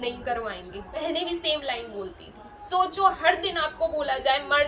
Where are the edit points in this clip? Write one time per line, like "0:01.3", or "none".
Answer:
0:01.0